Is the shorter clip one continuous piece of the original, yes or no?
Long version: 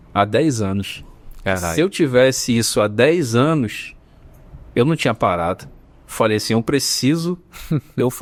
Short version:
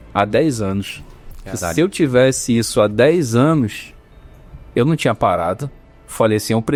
yes